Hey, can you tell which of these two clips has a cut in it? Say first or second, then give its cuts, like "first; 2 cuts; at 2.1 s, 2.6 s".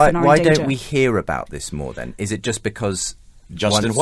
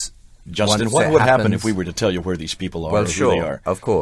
first; 1 cut; at 2.1 s